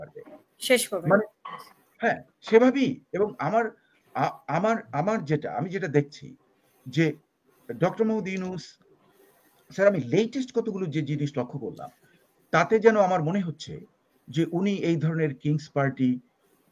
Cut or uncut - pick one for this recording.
uncut